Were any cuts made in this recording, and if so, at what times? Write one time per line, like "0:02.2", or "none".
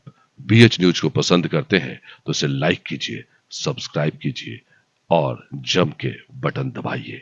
none